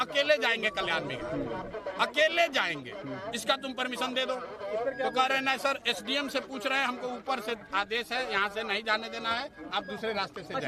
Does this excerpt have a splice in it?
no; 0 cuts

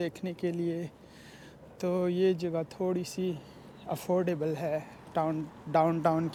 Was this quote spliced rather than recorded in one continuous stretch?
no; 0 cuts

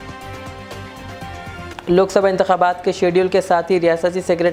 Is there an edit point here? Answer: no; 0 cuts

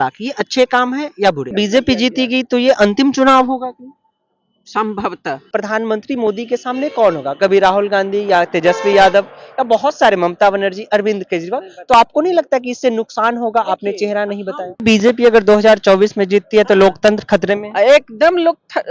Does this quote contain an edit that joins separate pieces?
yes; 3 cuts; at 1.5 s, 5.4 s, 14.8 s

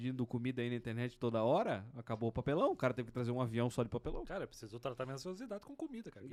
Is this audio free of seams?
yes; 0 cuts

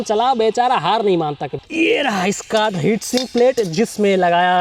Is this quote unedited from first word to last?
no; 1 cut; at 1.6 s

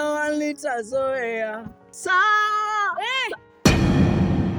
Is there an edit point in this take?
yes; 1 cut; at 3.4 s

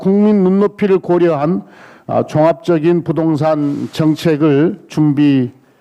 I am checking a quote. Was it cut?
no; 0 cuts

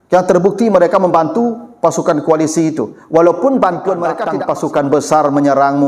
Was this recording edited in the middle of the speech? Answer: yes; 1 cut; at 4.3 s

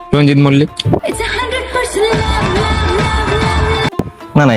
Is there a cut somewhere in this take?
yes; 2 cuts; at 1.0 s, 3.7 s

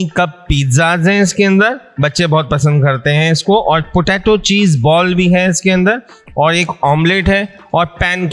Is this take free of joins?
yes; 0 cuts

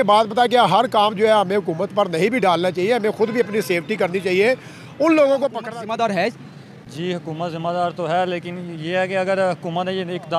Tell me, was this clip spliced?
yes; 1 cut; at 5.6 s

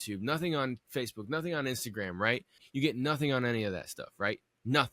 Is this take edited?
yes; 1 cut; at 2.6 s

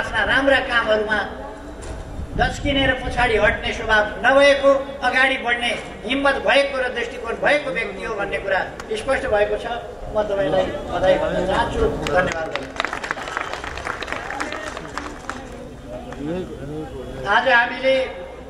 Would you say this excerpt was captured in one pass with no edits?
yes; 0 cuts

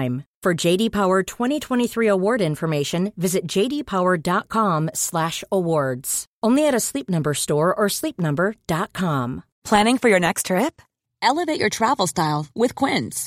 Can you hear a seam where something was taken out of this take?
yes; 1 cut; at 9.5 s

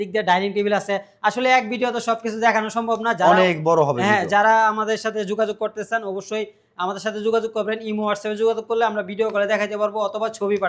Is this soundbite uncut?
yes; 0 cuts

